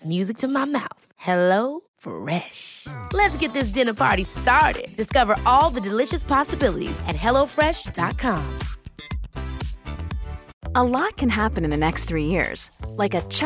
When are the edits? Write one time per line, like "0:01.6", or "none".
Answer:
0:10.5

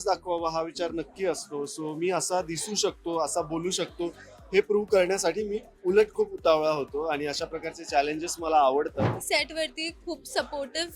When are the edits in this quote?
0:09.2

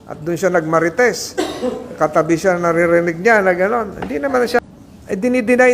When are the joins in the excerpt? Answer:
0:04.6

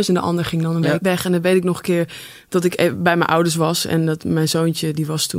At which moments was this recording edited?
0:01.0

